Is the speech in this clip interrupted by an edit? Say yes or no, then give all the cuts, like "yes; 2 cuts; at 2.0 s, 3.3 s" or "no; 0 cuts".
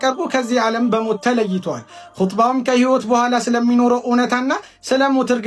no; 0 cuts